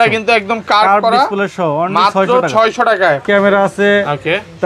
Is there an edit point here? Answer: yes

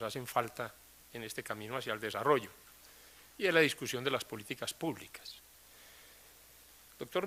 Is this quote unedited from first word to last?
yes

